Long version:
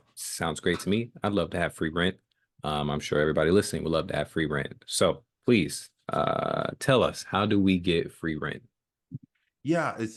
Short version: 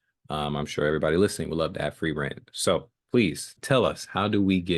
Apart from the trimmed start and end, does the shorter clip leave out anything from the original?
yes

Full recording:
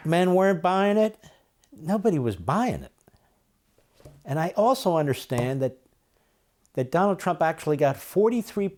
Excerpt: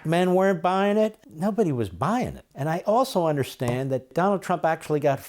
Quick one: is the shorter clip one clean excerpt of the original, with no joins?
no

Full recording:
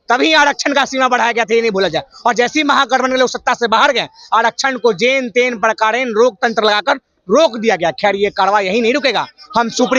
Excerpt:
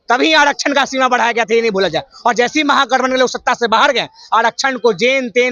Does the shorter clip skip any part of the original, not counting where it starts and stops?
no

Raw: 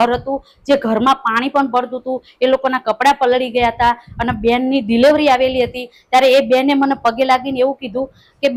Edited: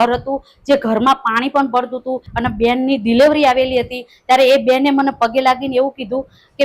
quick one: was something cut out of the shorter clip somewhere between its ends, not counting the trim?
yes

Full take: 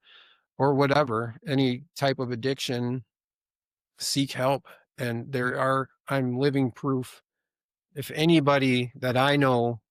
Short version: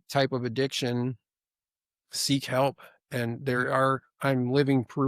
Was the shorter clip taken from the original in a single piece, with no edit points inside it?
yes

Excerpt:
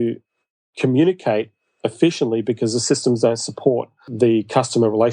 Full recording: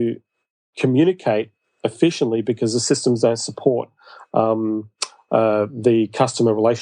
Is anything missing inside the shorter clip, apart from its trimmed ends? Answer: yes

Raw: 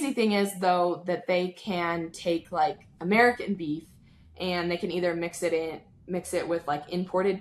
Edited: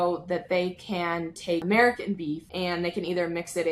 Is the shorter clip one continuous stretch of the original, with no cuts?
no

